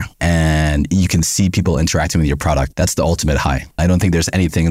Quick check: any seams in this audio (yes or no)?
no